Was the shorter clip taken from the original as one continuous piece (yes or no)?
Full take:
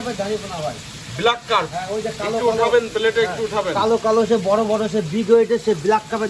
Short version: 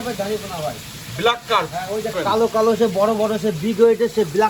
no